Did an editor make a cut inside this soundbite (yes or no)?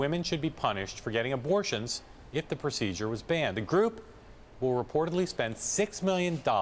yes